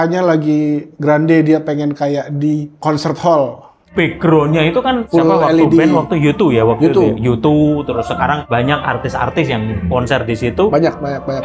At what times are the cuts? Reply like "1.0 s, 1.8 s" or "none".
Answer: 2.8 s, 3.8 s